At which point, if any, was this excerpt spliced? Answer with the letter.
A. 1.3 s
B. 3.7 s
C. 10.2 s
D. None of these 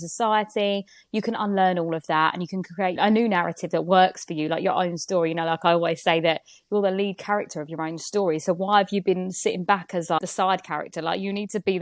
C